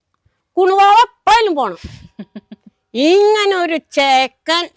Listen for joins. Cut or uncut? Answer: uncut